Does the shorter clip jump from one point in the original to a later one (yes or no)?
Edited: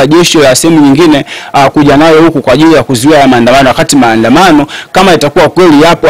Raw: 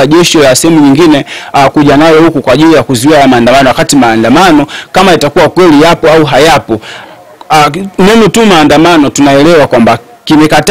no